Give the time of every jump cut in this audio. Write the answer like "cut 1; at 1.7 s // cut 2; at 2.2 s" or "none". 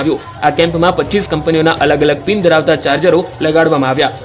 none